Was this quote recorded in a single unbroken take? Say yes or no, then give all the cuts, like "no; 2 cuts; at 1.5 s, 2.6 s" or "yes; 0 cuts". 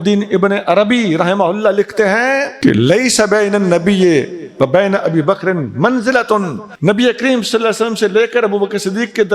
no; 2 cuts; at 2.5 s, 6.6 s